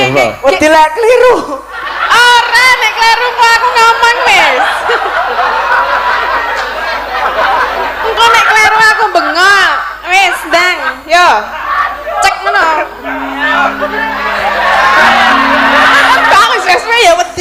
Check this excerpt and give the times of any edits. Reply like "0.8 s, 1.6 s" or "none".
none